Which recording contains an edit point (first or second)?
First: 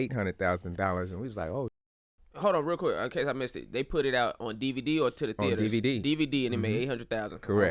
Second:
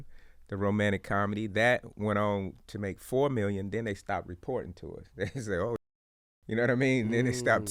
first